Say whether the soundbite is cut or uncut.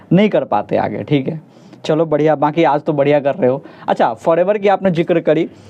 uncut